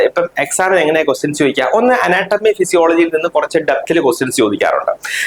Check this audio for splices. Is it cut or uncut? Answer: uncut